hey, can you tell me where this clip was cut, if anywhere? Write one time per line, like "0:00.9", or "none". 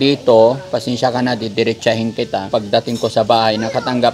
0:02.5